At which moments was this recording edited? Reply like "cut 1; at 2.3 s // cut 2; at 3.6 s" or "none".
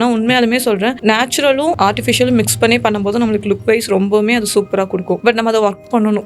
none